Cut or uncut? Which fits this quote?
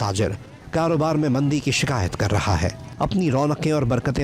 cut